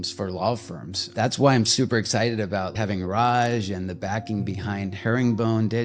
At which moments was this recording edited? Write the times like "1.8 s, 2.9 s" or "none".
1.1 s, 2.7 s